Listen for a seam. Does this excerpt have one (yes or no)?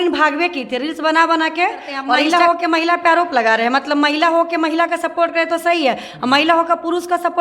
yes